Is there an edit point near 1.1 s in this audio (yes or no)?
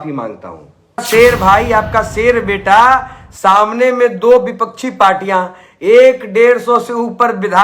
yes